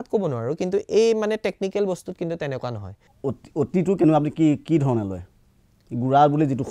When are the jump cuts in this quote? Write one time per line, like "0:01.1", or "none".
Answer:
0:03.0